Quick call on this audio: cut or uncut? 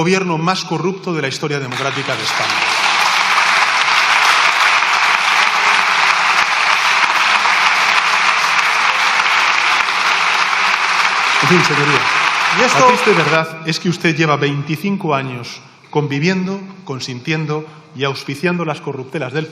cut